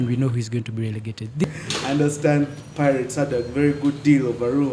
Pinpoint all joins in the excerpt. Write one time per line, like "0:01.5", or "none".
0:01.4